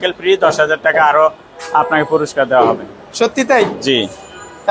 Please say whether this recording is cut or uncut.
uncut